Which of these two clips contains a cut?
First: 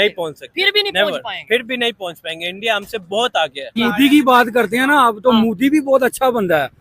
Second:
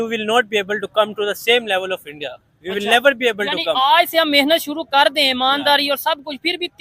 first; 1 cut; at 3.7 s

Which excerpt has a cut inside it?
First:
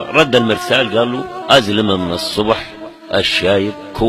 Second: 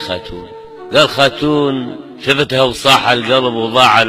first; 1 cut; at 3.0 s

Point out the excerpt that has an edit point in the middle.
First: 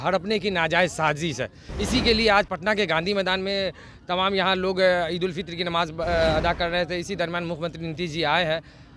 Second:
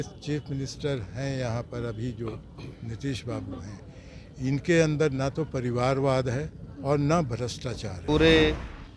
second; 1 cut; at 8.0 s

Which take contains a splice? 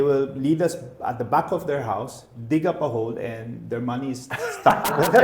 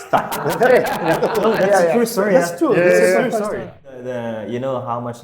second; 1 cut; at 3.7 s

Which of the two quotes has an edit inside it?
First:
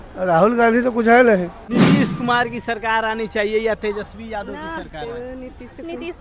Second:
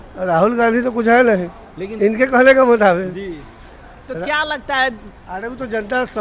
first; 1 cut; at 1.6 s

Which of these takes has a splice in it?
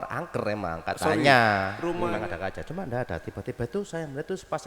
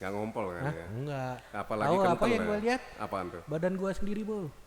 first; 1 cut; at 2.0 s

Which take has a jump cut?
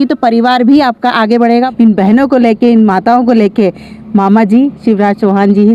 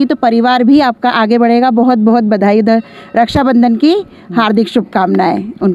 first; 1 cut; at 1.7 s

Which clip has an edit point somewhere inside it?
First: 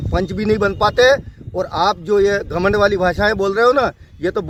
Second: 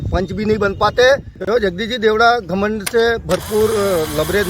second; 1 cut; at 1.3 s

